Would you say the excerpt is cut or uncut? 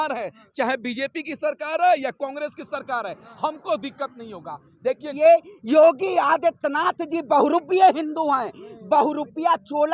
cut